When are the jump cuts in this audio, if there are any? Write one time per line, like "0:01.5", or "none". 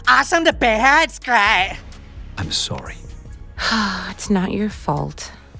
0:01.9